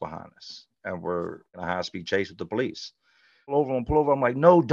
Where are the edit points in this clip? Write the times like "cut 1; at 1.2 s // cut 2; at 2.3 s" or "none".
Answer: cut 1; at 1.6 s // cut 2; at 3.5 s